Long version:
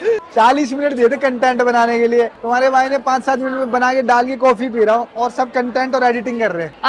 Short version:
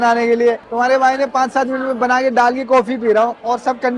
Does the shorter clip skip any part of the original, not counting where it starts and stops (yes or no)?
no